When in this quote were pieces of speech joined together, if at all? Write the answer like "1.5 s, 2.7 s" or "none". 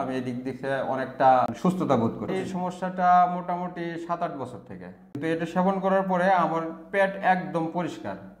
1.5 s, 2.3 s, 5.1 s